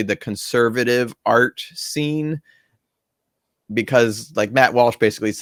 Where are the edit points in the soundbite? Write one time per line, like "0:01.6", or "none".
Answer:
none